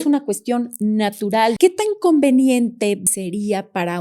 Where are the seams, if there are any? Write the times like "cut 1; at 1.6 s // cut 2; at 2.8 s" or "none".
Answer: cut 1; at 1.6 s // cut 2; at 3.0 s